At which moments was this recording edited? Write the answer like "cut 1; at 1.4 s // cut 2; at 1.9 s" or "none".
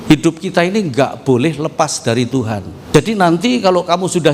cut 1; at 2.7 s